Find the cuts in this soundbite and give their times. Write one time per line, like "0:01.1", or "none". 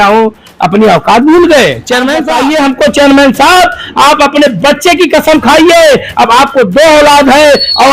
0:02.3

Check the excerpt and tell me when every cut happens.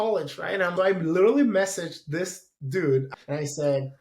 0:03.1

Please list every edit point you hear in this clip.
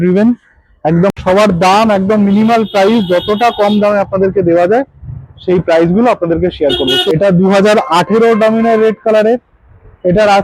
0:01.1
0:07.0

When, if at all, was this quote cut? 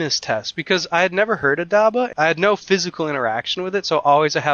0:02.1

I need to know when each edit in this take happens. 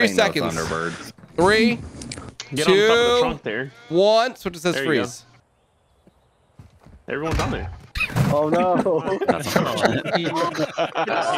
none

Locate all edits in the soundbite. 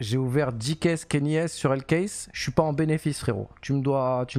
none

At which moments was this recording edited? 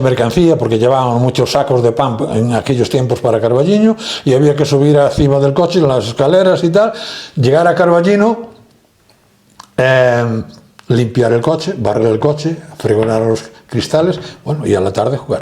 none

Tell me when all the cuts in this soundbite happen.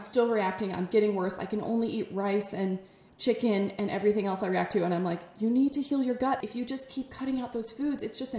0:06.4

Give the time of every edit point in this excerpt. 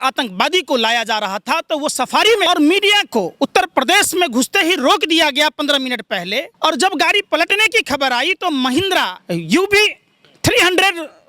0:02.5
0:06.5
0:09.2

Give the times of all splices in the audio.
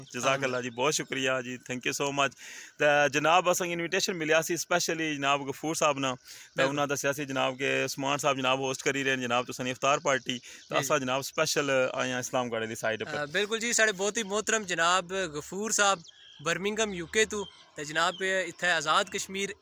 none

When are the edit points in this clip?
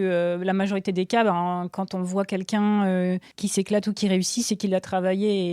0:03.3

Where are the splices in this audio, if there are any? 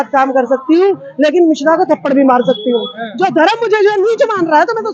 0:03.0

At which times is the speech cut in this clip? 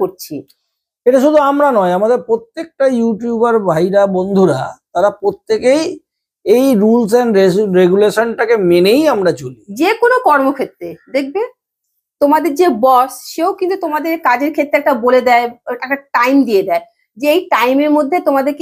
none

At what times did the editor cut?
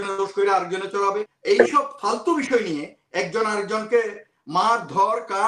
0:01.3

